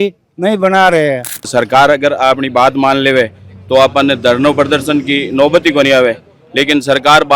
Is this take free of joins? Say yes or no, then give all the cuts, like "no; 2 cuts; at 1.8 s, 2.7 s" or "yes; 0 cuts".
no; 1 cut; at 1.5 s